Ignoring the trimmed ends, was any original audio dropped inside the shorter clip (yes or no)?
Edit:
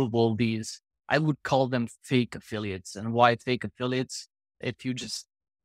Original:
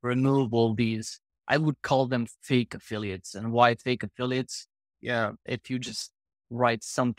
yes